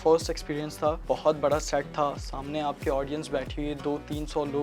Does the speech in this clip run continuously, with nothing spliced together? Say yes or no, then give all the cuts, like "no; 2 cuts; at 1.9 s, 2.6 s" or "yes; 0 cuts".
no; 1 cut; at 1.0 s